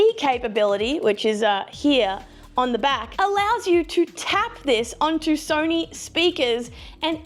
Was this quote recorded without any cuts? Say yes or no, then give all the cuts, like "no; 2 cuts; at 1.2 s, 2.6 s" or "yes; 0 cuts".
yes; 0 cuts